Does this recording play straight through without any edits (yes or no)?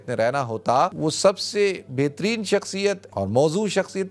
no